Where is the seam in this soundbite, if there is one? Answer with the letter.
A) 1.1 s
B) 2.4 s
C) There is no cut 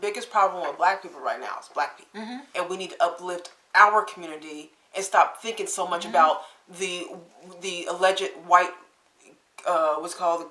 B